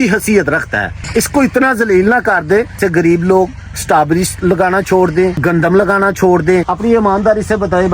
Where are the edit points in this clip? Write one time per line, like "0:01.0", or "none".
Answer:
0:01.0
0:02.8
0:05.4
0:06.7